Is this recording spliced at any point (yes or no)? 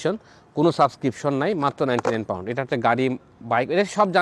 no